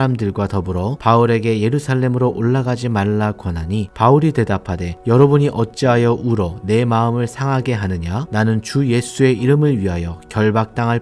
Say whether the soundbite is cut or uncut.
cut